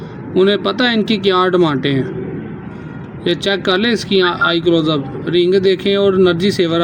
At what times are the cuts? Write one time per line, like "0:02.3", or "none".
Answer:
none